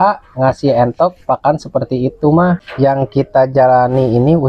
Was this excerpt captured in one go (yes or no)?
no